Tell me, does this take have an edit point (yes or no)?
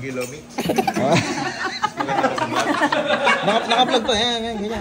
no